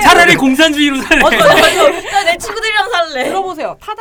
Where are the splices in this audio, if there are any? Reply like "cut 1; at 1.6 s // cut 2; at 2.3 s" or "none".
none